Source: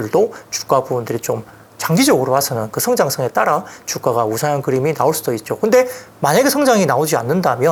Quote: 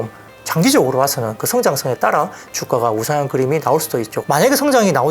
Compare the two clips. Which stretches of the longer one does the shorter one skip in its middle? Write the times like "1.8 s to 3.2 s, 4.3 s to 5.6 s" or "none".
5.5 s to 6.1 s

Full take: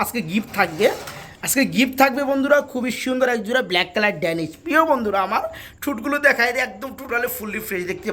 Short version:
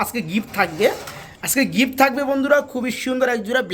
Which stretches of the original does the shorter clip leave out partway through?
none

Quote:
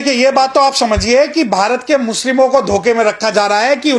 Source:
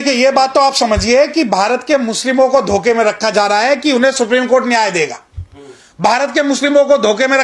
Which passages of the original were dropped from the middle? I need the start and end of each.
none

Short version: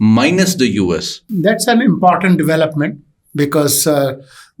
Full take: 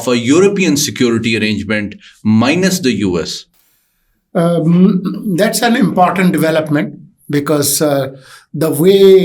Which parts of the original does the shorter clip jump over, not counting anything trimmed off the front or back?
3.5 s to 5.2 s

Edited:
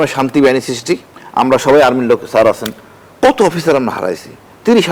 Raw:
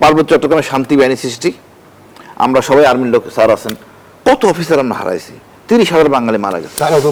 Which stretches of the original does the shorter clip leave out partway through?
1.7 s to 2.2 s

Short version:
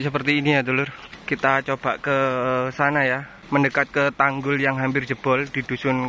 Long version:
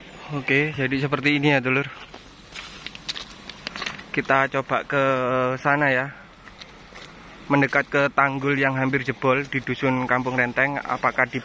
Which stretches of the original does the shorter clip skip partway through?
2.0 s to 3.9 s, 6.2 s to 7.3 s

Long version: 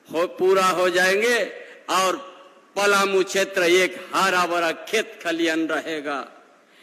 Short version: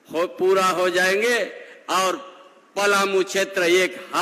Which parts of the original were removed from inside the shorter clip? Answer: none

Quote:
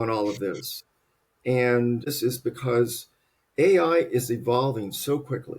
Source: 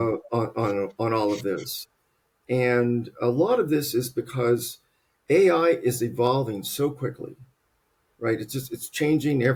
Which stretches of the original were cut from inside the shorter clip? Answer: 3.2 s to 3.8 s

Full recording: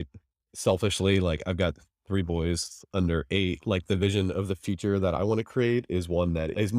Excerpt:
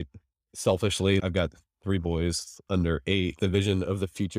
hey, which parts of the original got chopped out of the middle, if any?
1.2 s to 1.4 s, 3.6 s to 3.8 s

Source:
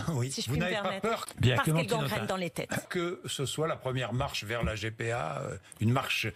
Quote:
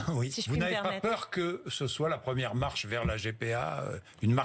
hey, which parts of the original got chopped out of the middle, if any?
1.3 s to 2.9 s

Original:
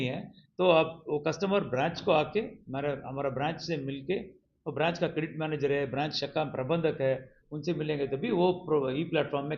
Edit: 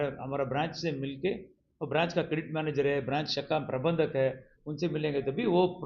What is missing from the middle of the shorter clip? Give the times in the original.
none

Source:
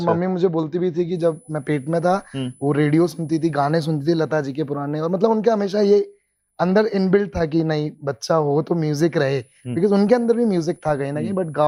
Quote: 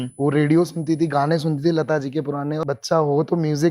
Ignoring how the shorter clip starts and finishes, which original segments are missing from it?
5.0 s to 8.0 s

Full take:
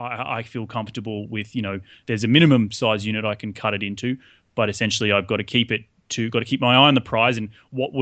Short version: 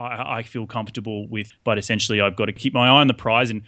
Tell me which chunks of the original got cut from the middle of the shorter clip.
1.5 s to 4.4 s, 5.5 s to 6.5 s

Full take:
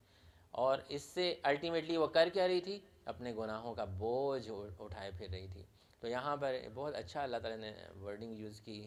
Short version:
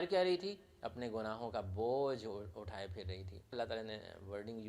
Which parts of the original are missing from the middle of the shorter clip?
5.8 s to 7.3 s

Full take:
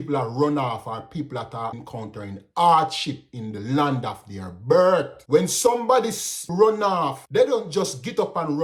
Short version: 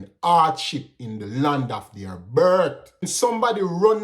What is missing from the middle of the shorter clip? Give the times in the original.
5.5 s to 5.9 s

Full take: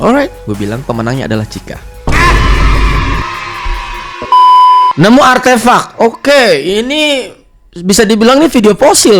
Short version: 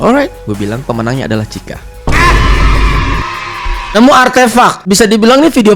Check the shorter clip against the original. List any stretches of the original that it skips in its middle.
3.9 s to 5.0 s, 5.9 s to 7.8 s

